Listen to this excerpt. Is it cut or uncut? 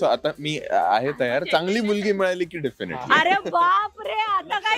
uncut